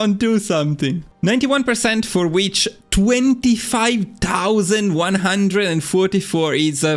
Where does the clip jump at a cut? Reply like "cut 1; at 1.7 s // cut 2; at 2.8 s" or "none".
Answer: cut 1; at 1.1 s